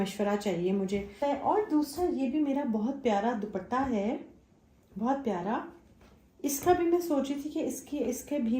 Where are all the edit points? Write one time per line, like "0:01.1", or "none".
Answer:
0:01.2